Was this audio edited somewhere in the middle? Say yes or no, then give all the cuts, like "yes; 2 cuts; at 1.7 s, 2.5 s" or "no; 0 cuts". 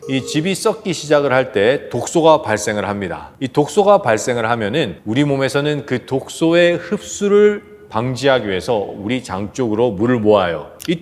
no; 0 cuts